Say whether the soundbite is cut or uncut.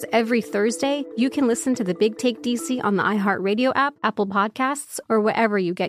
cut